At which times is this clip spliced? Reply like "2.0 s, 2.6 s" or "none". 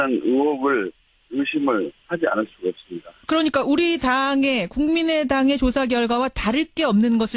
none